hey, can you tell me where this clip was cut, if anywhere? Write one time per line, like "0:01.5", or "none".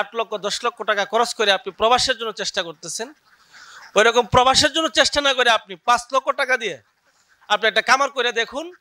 none

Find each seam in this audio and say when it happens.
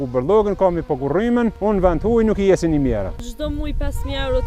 0:01.6
0:03.3

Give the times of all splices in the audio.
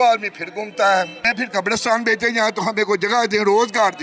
0:01.3

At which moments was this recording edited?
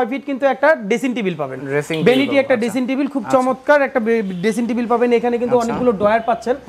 none

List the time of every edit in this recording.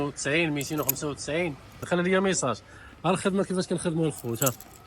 0:01.9

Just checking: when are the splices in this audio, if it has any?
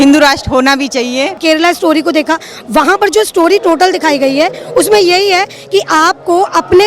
0:01.4

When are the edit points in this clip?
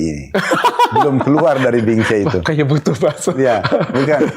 none

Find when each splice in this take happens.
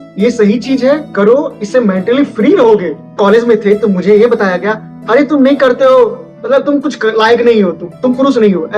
0:03.0

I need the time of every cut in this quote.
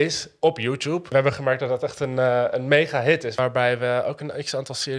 0:01.1
0:03.4

